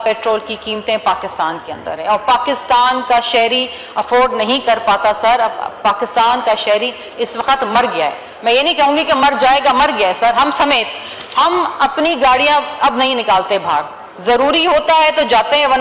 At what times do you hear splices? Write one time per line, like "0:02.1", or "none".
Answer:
none